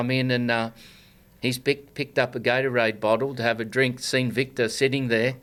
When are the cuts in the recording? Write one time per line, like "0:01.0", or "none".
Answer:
none